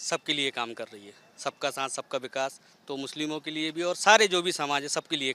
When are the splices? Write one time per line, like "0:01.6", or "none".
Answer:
none